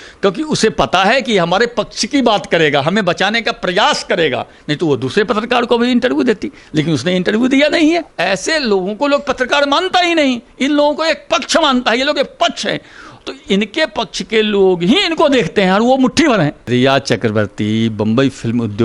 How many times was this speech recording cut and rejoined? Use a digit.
2